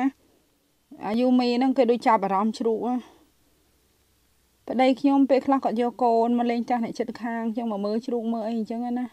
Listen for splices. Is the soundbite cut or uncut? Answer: cut